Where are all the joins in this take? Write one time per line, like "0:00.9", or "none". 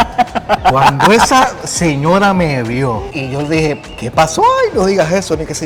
none